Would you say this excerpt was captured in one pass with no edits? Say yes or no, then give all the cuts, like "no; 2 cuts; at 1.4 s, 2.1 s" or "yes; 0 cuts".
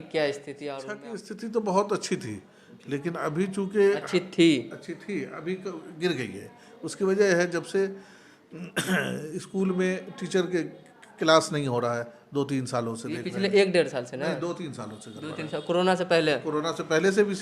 no; 1 cut; at 1.0 s